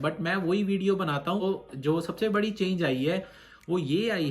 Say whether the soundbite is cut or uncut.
cut